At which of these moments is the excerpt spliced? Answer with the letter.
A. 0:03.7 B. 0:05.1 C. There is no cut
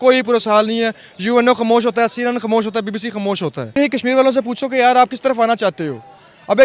A